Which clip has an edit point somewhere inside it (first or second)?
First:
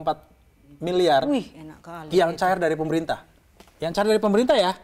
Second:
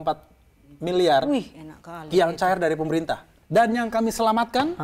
second